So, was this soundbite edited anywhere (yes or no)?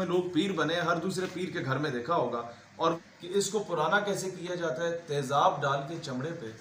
yes